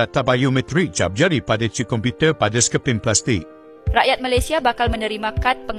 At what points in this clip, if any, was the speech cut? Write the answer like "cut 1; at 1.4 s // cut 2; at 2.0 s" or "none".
cut 1; at 3.7 s